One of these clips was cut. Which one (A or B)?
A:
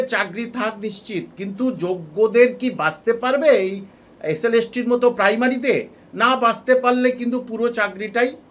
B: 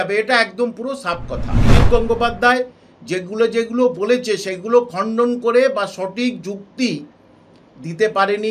B